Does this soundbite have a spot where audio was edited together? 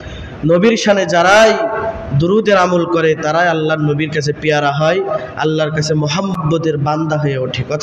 yes; 1 cut; at 6.4 s

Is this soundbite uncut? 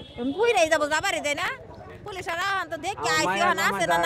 yes; 0 cuts

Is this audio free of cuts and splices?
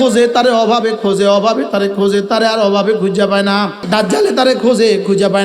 no; 1 cut; at 3.8 s

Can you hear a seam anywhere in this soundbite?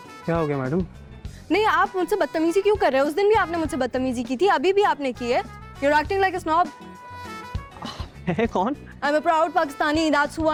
no; 0 cuts

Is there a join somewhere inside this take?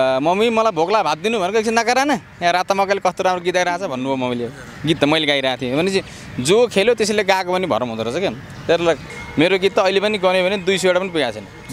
yes; 1 cut; at 9.2 s

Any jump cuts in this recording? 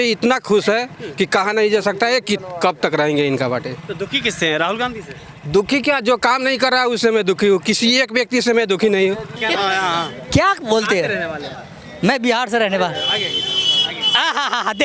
no; 0 cuts

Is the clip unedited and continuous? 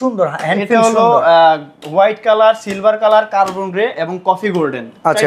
yes; 0 cuts

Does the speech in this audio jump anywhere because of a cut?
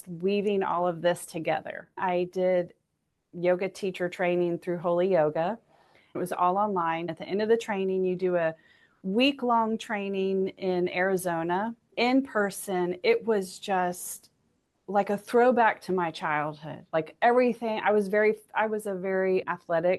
yes; 4 cuts; at 1.9 s, 6.2 s, 7.2 s, 11.9 s

